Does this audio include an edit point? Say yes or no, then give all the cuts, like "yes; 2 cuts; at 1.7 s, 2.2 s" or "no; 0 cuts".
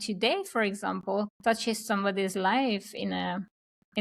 yes; 1 cut; at 1.3 s